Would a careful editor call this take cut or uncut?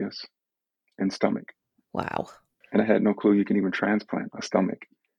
uncut